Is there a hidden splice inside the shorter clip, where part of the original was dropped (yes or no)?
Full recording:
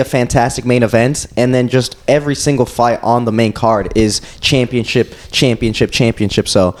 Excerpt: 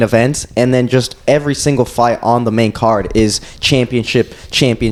no